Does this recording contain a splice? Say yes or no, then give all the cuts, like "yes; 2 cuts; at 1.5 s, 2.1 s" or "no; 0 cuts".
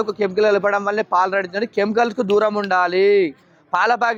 no; 0 cuts